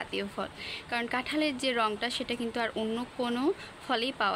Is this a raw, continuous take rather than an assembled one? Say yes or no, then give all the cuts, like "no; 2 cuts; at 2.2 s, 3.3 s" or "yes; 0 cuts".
yes; 0 cuts